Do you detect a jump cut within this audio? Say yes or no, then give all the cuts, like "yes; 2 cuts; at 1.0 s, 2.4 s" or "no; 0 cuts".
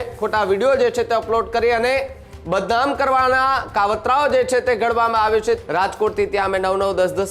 yes; 1 cut; at 5.6 s